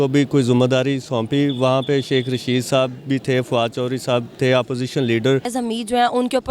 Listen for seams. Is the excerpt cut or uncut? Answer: cut